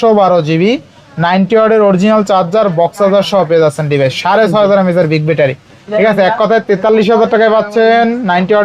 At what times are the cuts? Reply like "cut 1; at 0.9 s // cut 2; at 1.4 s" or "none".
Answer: none